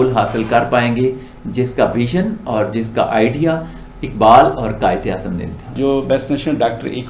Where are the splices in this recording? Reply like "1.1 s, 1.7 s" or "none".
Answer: 5.8 s